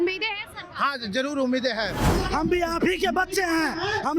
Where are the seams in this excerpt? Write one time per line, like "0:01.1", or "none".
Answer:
0:02.1